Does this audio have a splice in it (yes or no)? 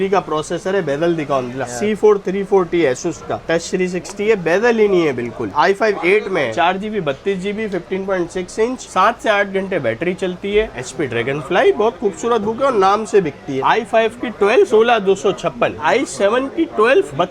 yes